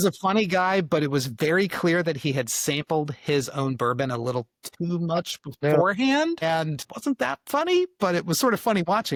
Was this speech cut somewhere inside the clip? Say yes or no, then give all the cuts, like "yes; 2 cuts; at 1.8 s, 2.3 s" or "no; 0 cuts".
no; 0 cuts